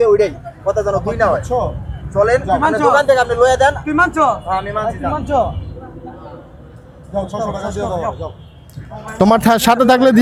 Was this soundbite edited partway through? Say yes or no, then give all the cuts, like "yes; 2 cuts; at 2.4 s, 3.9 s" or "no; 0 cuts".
no; 0 cuts